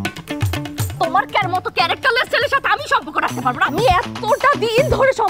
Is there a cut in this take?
yes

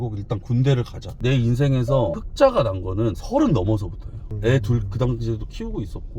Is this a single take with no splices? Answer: no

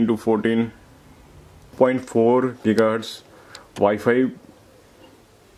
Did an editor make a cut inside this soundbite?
yes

